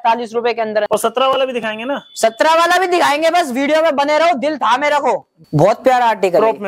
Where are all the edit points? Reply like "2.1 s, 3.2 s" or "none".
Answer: 0.9 s, 5.3 s